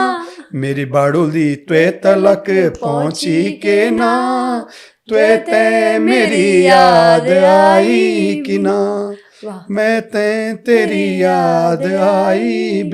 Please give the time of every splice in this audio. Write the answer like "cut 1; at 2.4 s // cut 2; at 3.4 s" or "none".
none